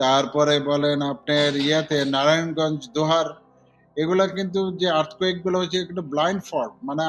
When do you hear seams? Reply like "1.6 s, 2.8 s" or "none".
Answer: none